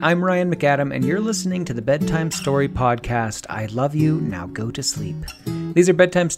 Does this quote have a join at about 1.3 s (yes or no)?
no